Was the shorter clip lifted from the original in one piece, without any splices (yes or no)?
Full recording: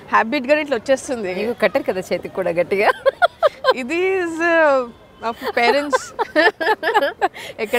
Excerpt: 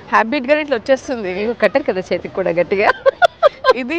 yes